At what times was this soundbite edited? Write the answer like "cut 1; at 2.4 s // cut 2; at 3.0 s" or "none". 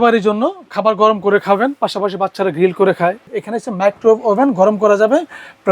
cut 1; at 3.3 s